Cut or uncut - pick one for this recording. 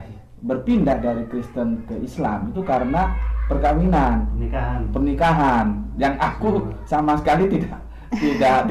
uncut